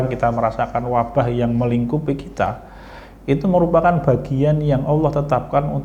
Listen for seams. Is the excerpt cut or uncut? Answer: uncut